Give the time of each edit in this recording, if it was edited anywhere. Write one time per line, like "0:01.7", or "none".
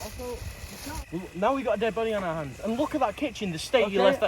0:01.1

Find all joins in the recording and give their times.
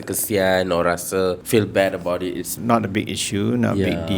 0:01.4
0:02.5

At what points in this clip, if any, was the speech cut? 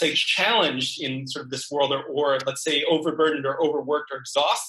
none

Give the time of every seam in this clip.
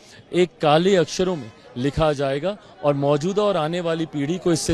none

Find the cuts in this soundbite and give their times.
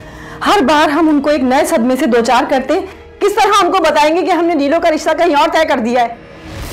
none

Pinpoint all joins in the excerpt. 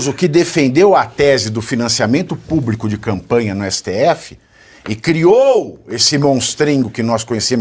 none

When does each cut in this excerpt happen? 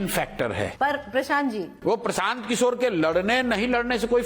none

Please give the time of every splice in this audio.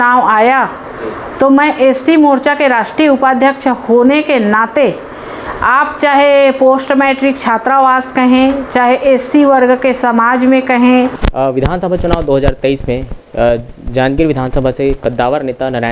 0:11.2

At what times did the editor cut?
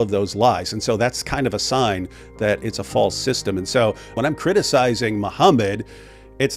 0:04.1

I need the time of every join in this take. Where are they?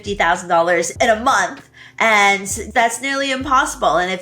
0:00.9
0:02.6

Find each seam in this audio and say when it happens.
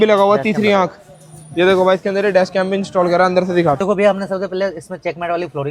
none

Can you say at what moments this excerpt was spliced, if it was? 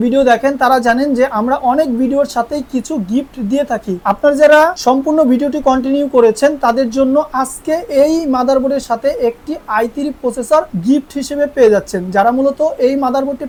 none

